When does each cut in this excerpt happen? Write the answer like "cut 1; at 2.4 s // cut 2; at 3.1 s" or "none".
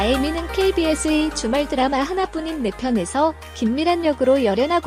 none